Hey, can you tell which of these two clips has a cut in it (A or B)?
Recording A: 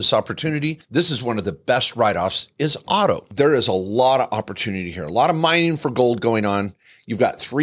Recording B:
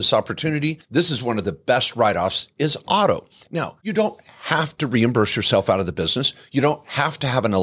A